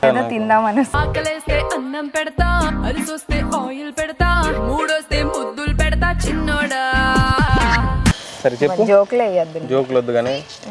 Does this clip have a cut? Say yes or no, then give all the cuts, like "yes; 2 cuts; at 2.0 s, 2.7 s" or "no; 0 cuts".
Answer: no; 0 cuts